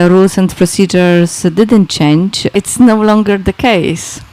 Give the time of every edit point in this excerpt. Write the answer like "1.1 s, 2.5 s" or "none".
2.4 s